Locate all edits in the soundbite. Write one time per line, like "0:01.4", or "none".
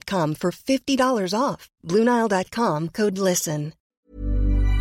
0:03.9